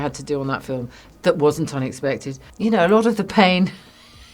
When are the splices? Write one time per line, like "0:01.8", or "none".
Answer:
0:02.4